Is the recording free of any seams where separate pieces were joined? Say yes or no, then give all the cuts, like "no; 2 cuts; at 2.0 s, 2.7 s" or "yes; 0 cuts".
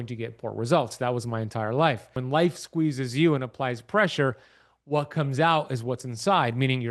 no; 1 cut; at 2.2 s